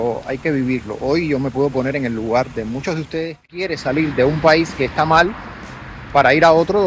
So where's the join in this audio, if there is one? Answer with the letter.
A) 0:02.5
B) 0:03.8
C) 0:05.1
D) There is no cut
B